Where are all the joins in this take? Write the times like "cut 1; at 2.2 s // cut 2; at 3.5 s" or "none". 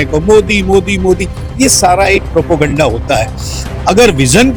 none